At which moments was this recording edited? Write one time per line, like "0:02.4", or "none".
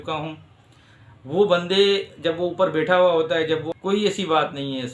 0:03.7